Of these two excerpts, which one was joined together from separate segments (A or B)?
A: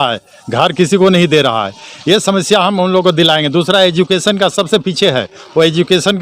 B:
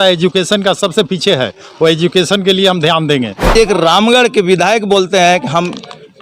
B